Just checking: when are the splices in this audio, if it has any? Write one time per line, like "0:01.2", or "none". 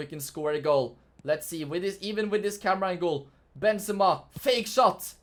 none

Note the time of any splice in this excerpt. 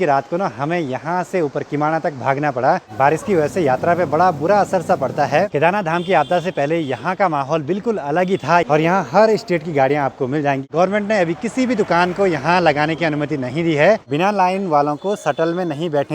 0:02.9
0:05.5
0:08.7
0:10.6
0:14.0

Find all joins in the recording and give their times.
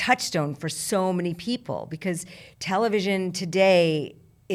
none

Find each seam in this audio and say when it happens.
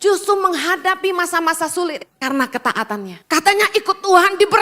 0:02.1
0:03.2

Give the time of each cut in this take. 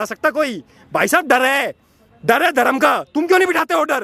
none

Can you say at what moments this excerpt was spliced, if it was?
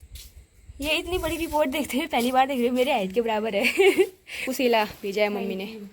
0:04.5

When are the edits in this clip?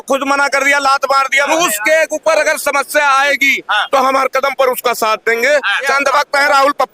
0:01.5
0:05.9

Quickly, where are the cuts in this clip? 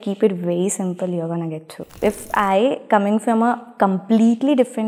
0:02.0

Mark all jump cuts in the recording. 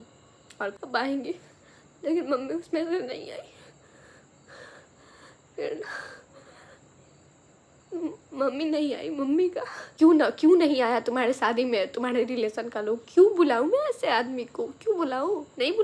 0:00.8
0:09.8

